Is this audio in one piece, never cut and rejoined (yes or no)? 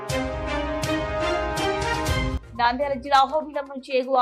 yes